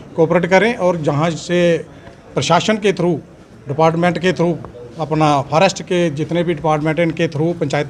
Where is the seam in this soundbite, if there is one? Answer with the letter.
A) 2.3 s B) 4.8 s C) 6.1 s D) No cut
D